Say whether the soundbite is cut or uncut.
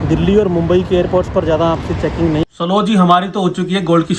cut